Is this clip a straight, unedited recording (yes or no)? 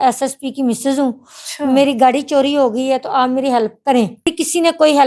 yes